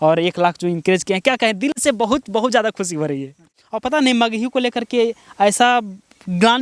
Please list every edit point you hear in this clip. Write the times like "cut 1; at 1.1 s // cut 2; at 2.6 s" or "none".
cut 1; at 3.5 s